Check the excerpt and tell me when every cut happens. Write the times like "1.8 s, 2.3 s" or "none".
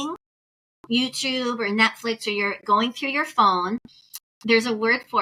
none